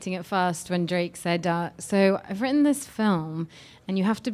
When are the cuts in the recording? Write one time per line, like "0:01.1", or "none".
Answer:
0:02.7